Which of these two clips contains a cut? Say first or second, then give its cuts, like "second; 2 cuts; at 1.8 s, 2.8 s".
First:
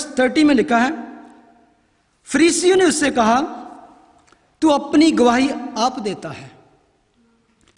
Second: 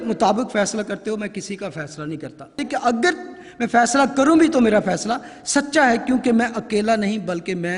second; 1 cut; at 2.6 s